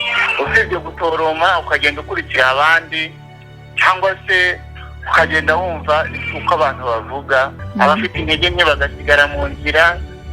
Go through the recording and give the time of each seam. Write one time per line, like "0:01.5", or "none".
0:07.6